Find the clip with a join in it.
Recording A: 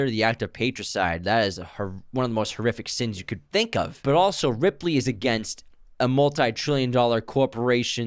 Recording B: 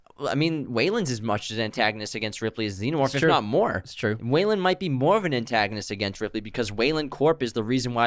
A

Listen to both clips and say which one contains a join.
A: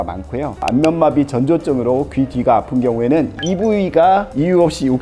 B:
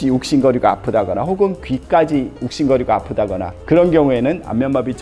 A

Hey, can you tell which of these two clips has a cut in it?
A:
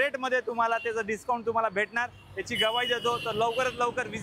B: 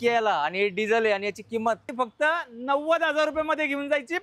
B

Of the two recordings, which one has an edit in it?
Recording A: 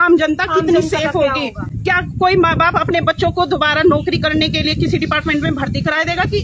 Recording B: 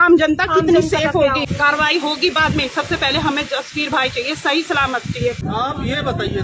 B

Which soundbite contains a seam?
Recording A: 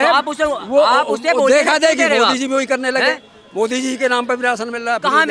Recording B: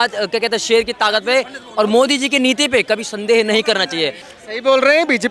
B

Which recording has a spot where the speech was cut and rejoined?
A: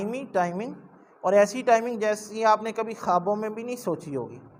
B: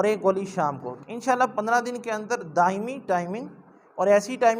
B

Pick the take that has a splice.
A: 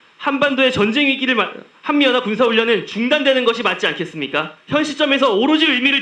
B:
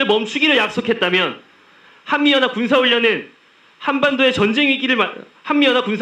A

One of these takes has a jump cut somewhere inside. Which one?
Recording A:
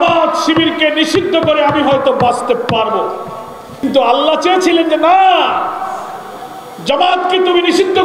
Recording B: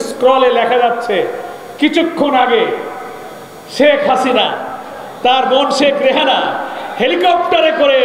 A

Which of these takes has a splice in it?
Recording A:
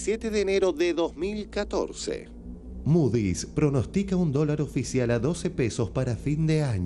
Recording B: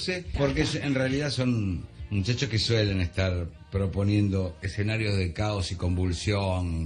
B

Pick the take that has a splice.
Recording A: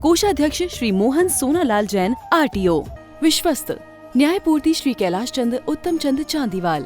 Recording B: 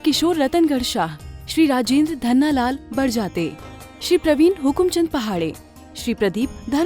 A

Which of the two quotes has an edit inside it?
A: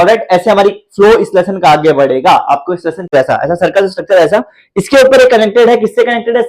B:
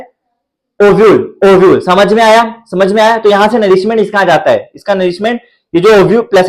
A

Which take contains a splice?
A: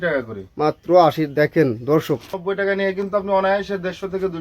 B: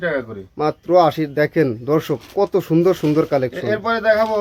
A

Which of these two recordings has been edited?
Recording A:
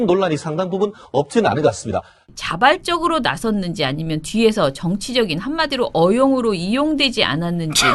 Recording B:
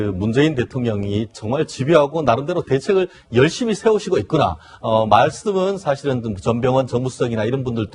B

